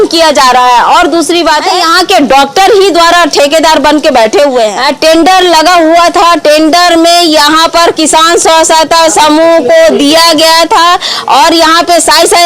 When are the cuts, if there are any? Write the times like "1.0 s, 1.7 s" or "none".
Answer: 1.7 s, 4.8 s